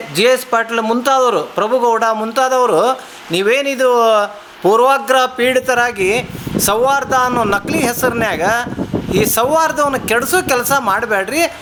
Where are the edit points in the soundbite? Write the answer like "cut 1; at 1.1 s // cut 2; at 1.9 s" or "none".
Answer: none